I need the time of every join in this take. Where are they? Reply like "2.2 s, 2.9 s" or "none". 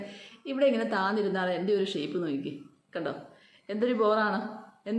none